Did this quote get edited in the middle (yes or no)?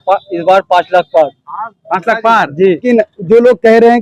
yes